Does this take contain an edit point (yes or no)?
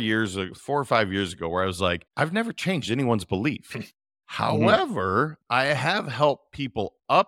yes